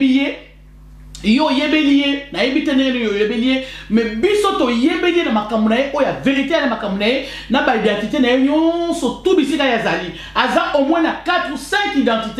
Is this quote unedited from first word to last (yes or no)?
yes